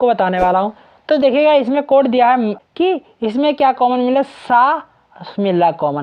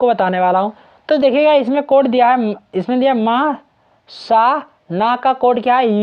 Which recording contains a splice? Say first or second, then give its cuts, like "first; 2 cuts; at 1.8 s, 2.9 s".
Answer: first; 1 cut; at 2.6 s